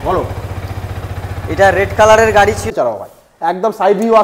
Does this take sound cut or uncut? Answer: cut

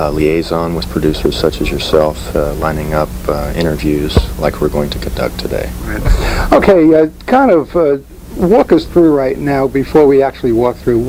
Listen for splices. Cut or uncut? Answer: uncut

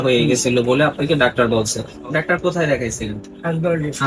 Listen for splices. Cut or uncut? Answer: uncut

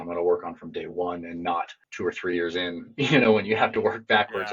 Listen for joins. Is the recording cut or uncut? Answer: cut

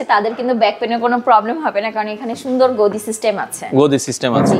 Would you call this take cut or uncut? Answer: uncut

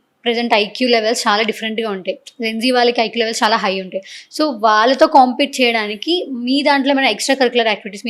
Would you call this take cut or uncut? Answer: uncut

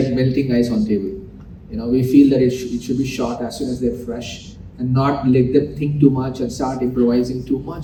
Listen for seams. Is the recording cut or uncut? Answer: uncut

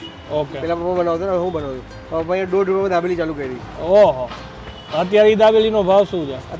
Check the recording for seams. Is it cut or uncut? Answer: uncut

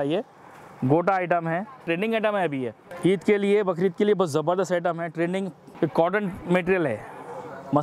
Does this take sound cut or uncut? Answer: cut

